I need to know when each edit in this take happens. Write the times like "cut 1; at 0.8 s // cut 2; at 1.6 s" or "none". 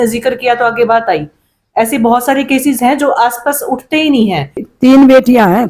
cut 1; at 4.7 s